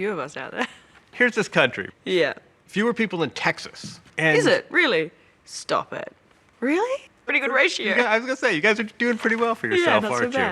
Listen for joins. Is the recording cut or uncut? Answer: cut